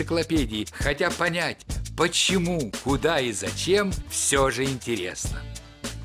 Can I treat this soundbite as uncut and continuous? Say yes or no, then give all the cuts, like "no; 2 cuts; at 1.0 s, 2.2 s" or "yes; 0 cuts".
no; 1 cut; at 5.1 s